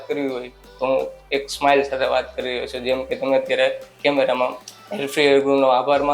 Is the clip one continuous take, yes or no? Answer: no